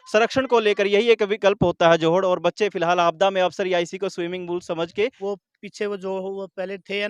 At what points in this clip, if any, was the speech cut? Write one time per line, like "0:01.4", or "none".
0:05.2